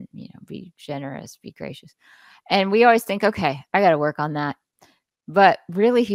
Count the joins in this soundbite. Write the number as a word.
zero